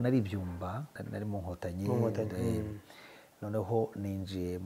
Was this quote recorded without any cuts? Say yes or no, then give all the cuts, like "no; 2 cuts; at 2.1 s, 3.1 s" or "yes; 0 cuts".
no; 1 cut; at 1.0 s